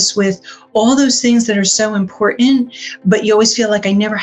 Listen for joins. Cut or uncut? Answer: uncut